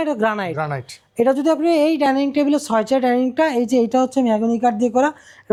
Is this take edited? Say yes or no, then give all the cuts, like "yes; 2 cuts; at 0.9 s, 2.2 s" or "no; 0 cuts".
no; 0 cuts